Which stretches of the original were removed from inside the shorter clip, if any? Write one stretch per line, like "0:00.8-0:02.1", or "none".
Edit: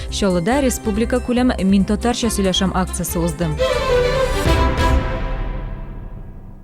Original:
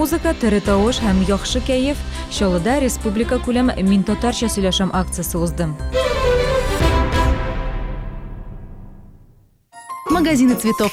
0:05.7-0:05.9